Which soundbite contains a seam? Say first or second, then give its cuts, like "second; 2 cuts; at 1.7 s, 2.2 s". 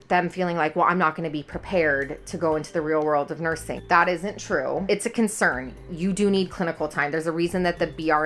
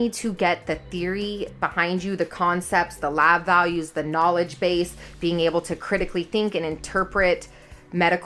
first; 2 cuts; at 3.7 s, 4.8 s